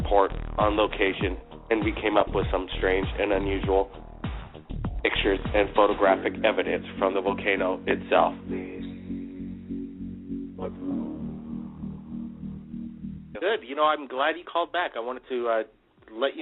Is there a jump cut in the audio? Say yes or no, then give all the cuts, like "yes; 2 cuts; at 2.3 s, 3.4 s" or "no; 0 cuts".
no; 0 cuts